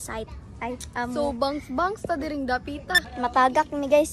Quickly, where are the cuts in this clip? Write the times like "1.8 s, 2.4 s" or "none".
3.1 s